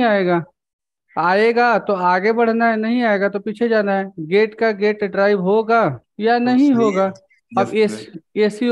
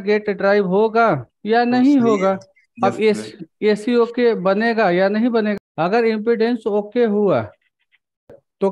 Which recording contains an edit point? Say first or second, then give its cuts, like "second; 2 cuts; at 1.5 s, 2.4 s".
second; 1 cut; at 5.5 s